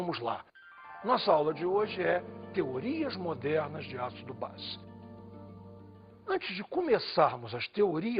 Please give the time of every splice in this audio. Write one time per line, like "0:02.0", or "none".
0:01.4